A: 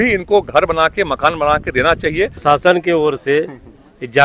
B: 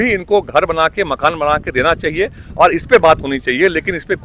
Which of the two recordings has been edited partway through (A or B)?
A